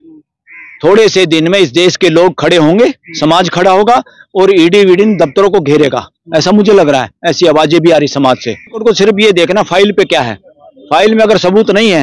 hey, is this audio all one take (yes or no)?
no